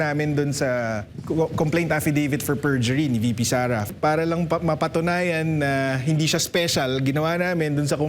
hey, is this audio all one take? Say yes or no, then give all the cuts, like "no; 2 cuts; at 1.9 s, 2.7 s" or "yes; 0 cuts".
no; 2 cuts; at 1.1 s, 3.8 s